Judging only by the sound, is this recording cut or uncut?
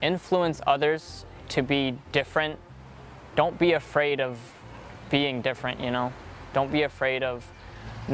uncut